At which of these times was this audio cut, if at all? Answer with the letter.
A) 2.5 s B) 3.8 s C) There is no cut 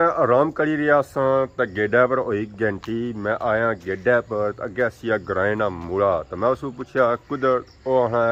C